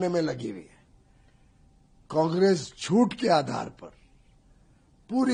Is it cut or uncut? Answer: uncut